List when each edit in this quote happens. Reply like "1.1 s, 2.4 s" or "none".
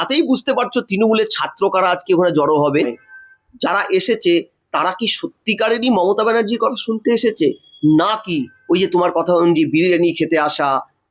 3.0 s